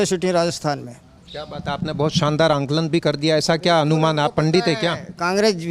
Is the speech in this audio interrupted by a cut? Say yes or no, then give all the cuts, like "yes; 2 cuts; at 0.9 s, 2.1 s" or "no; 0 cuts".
no; 0 cuts